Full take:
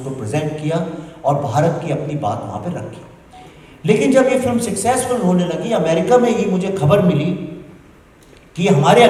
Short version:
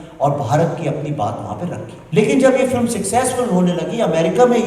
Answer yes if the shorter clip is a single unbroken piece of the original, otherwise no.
no